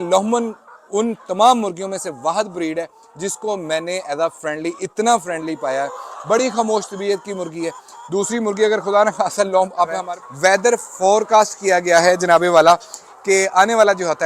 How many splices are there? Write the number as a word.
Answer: one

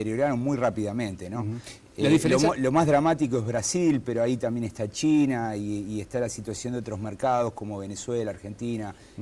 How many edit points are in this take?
zero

